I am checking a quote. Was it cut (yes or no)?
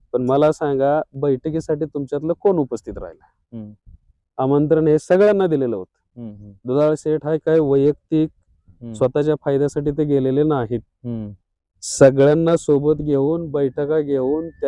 no